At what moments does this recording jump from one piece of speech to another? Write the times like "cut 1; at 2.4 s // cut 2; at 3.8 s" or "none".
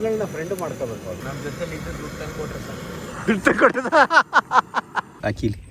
cut 1; at 1.2 s